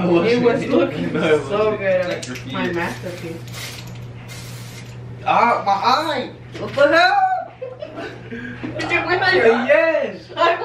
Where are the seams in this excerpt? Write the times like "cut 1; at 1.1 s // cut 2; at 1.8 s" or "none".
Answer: cut 1; at 2.3 s

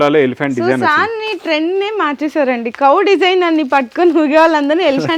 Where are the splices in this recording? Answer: none

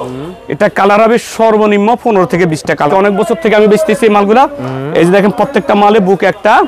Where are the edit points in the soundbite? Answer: cut 1; at 2.9 s

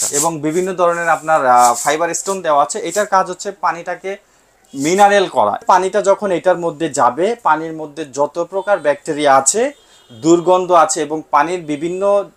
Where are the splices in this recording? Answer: cut 1; at 5.6 s

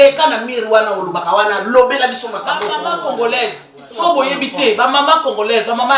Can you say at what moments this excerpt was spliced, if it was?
cut 1; at 2.7 s

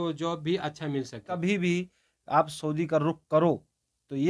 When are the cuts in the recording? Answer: cut 1; at 1.3 s

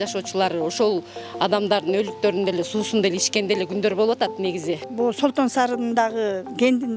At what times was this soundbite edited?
cut 1; at 4.8 s

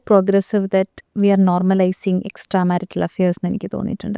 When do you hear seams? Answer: none

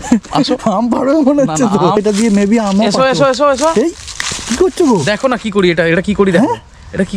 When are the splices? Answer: cut 1; at 2.0 s

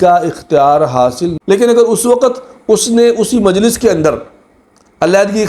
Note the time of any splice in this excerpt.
cut 1; at 1.4 s

